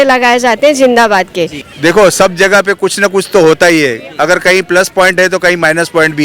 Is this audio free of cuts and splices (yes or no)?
no